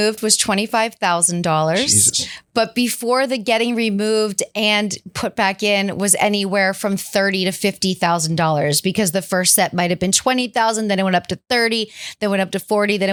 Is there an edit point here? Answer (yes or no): no